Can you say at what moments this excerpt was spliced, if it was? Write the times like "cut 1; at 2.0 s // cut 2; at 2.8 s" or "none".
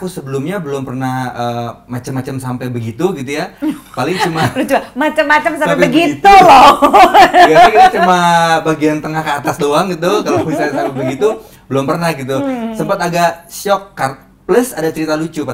none